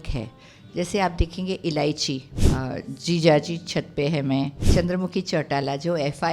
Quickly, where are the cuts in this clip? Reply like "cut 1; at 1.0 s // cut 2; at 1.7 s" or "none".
cut 1; at 2.4 s // cut 2; at 4.6 s